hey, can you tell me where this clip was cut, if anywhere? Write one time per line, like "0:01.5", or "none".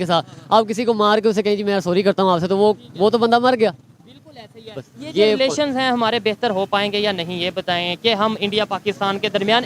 none